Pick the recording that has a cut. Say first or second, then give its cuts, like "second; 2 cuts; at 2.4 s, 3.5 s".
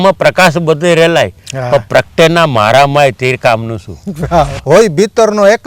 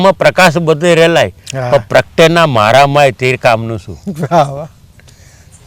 first; 1 cut; at 4.6 s